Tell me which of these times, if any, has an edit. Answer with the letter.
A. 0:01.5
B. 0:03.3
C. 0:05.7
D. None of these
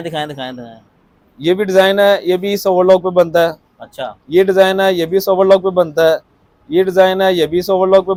D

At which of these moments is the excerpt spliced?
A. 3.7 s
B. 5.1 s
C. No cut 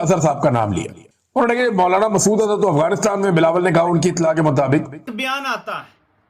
B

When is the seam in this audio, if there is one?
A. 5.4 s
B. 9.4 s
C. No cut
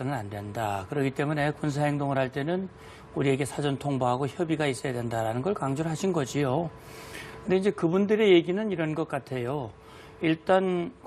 A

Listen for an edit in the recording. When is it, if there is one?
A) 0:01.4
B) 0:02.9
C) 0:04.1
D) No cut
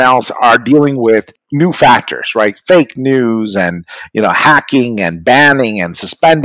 A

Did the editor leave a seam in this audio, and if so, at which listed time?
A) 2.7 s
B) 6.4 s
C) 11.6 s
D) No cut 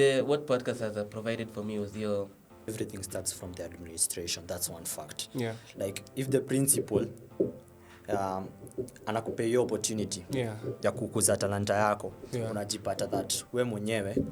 A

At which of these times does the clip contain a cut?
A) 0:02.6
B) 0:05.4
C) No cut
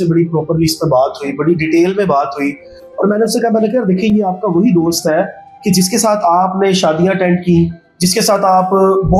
C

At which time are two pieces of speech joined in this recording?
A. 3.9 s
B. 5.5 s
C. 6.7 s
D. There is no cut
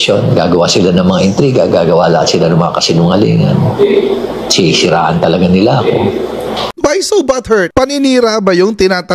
C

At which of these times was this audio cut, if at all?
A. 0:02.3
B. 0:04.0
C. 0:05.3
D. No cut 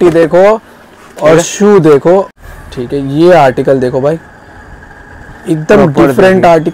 A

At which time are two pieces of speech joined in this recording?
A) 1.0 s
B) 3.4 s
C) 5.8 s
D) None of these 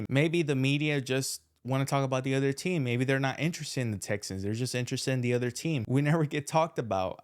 C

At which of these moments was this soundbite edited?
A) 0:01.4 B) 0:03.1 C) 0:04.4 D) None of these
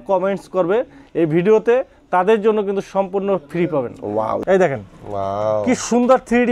C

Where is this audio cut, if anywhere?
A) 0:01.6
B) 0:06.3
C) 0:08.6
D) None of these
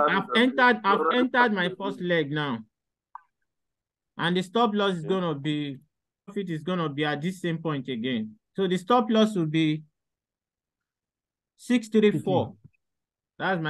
B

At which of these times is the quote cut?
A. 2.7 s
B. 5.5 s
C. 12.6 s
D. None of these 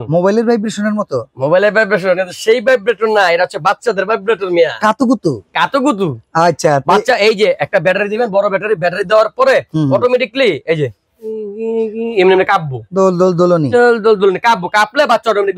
D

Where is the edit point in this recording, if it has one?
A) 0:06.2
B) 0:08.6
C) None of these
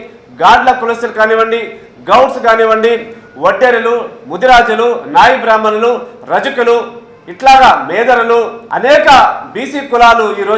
B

